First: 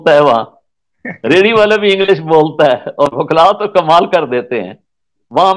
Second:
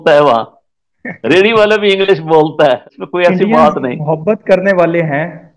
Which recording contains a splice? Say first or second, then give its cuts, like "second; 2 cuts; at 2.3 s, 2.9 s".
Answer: second; 1 cut; at 2.9 s